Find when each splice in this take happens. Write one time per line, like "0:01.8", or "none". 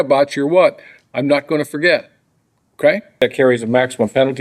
0:03.2